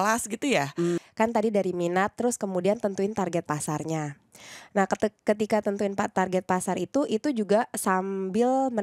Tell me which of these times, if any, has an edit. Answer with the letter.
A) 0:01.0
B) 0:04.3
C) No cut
A